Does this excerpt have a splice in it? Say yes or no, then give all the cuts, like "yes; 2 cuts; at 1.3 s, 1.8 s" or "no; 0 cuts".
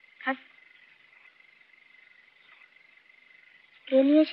no; 0 cuts